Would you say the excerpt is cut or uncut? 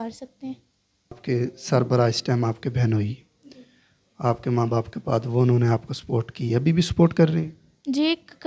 cut